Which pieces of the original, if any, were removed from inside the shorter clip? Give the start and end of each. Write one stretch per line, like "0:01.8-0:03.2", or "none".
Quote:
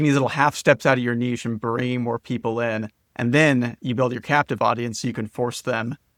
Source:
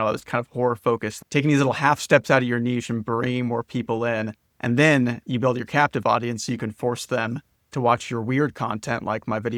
none